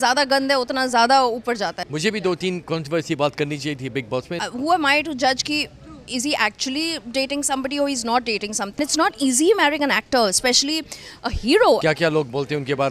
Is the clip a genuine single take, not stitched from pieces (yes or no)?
no